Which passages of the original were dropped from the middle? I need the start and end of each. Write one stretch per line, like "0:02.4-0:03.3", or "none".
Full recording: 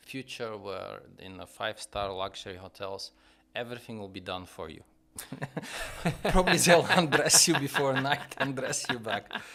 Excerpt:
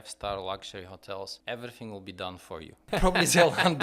0:03.1-0:03.4
0:04.9-0:06.2